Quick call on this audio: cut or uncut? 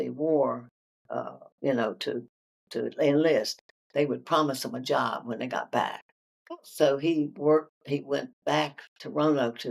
uncut